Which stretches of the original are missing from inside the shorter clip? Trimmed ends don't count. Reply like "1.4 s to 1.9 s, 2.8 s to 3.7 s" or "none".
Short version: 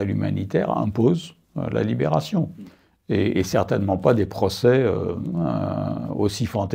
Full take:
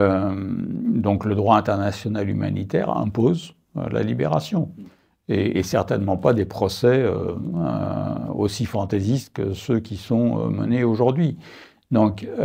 none

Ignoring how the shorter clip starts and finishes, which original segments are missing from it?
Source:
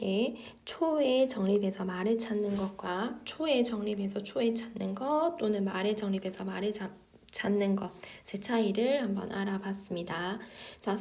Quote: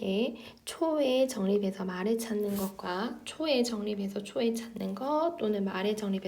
none

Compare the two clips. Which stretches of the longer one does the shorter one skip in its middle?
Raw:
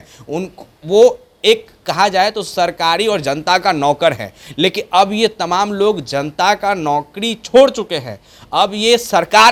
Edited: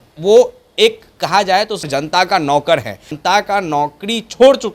2.5 s to 3.2 s, 4.5 s to 6.3 s

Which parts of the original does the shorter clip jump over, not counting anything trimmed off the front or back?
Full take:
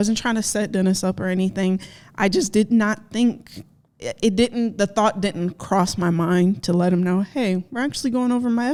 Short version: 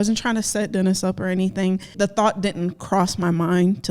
1.9 s to 4.7 s

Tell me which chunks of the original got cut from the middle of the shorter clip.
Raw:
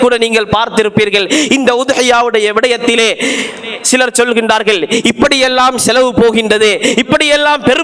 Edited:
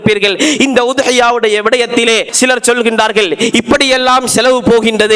3.2 s to 3.8 s

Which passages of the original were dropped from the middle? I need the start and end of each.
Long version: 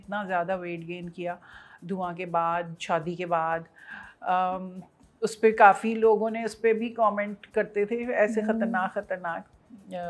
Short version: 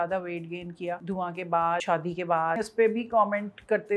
1.4 s to 1.8 s, 2.6 s to 2.8 s, 3.7 s to 6.5 s

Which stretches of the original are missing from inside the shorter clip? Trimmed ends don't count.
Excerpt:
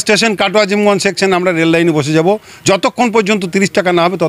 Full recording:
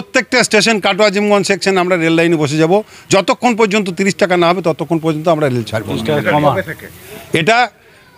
none

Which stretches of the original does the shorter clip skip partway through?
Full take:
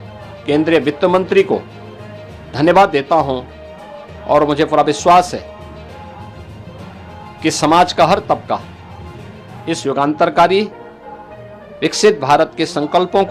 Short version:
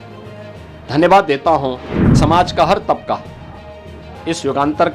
3.8 s to 7.6 s

